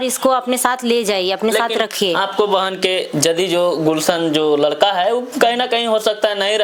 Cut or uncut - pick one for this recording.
uncut